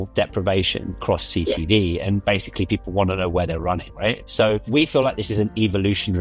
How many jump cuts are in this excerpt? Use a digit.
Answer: 2